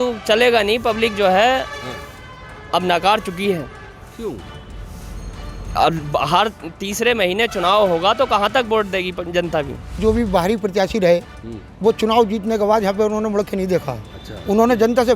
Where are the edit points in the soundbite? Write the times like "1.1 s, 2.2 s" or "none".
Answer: 10.0 s